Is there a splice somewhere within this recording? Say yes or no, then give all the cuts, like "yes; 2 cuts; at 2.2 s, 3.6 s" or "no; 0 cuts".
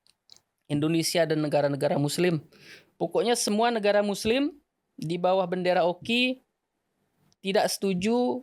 no; 0 cuts